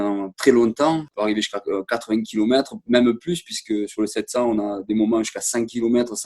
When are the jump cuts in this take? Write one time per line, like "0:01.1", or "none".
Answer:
0:01.1